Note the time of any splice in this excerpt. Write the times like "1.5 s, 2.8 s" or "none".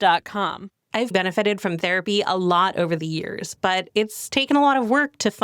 1.1 s